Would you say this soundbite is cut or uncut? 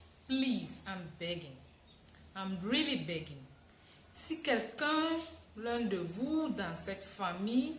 uncut